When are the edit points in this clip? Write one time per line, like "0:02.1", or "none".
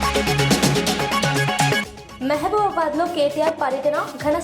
0:01.8